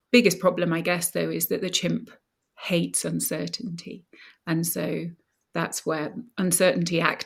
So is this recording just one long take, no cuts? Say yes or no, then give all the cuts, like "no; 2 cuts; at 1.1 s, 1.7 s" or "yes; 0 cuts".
yes; 0 cuts